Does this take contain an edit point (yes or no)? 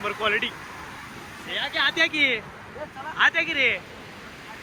no